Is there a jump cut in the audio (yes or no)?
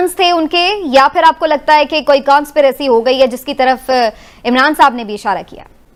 no